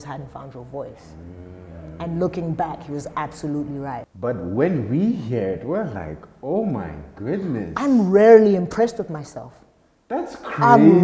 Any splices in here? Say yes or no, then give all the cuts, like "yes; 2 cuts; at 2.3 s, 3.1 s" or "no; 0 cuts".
yes; 1 cut; at 4.1 s